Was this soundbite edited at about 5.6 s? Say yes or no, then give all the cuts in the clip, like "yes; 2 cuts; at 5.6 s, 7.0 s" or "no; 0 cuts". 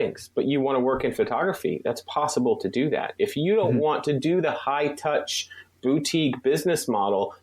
no; 0 cuts